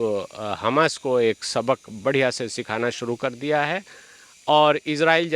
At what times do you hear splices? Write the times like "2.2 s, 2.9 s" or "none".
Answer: none